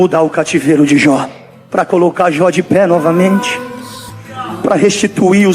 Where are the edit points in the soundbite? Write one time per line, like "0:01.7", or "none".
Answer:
0:01.4